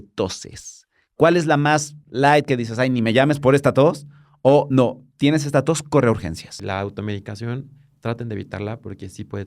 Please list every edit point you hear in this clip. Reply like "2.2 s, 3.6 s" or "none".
6.5 s

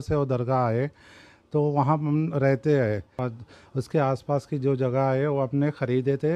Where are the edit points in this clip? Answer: 3.0 s

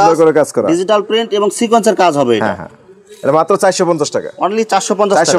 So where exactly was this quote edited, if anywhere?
none

